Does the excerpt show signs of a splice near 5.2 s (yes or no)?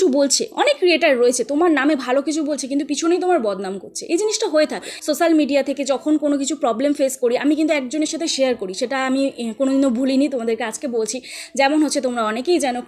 yes